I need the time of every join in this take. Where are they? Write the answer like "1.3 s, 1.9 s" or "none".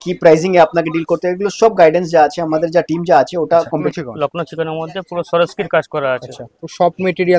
3.8 s